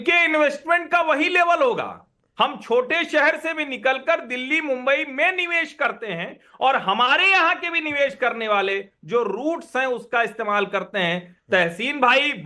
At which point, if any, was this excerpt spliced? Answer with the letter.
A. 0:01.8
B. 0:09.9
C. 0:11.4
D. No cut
D